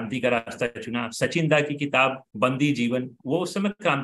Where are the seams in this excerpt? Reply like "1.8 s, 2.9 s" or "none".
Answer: 2.2 s, 3.1 s